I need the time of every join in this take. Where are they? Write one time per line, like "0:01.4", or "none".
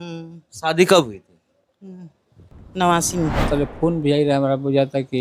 0:03.8